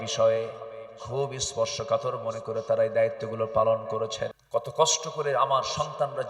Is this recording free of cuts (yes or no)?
no